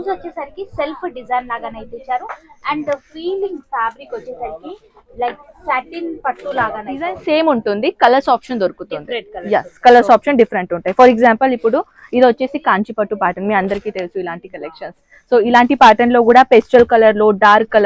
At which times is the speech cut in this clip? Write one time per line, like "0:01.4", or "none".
0:07.2